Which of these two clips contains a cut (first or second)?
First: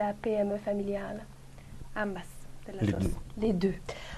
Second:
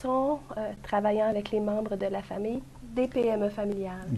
second